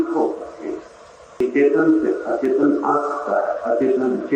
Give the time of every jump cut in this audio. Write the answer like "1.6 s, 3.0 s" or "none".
1.4 s